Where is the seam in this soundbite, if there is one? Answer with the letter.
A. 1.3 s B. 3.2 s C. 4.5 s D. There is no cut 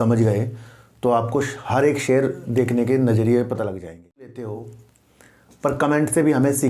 C